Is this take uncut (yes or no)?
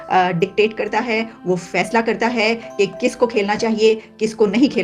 yes